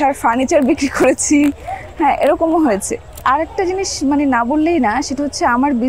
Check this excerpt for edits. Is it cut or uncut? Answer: cut